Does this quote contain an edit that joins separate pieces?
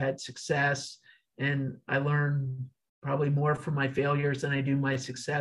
no; 0 cuts

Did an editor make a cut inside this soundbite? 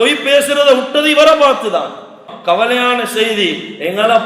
yes; 1 cut; at 2.3 s

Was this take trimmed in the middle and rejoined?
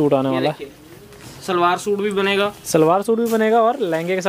no; 0 cuts

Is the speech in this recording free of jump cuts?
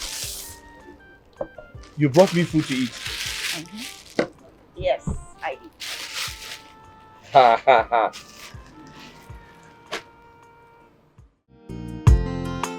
no; 1 cut; at 11.9 s

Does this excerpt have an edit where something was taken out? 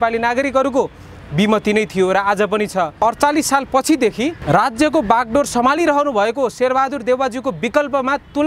yes; 2 cuts; at 2.9 s, 4.4 s

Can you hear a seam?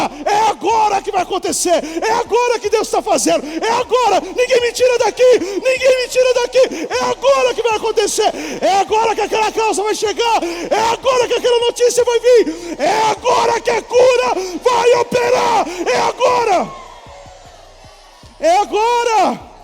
no; 0 cuts

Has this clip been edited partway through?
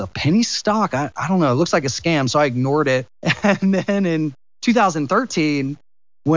no; 0 cuts

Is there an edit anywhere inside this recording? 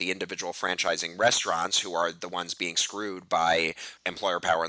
no; 0 cuts

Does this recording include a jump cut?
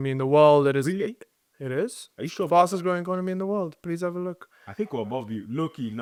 no; 0 cuts

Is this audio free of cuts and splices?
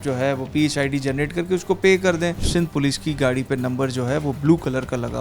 no; 1 cut; at 2.4 s

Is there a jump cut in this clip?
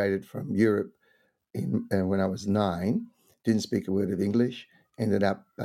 no; 0 cuts

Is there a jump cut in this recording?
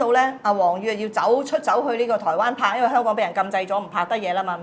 no; 0 cuts

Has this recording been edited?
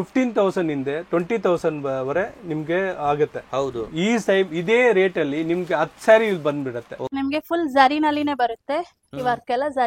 yes; 1 cut; at 7.0 s

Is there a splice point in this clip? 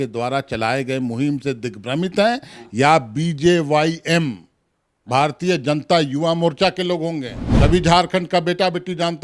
yes; 1 cut; at 7.4 s

